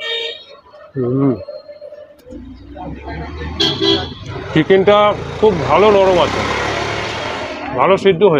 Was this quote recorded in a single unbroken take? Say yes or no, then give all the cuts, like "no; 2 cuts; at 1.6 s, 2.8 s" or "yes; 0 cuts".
no; 1 cut; at 2.1 s